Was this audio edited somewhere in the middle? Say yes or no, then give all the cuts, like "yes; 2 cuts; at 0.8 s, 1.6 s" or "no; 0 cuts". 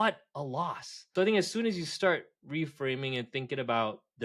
yes; 1 cut; at 1.1 s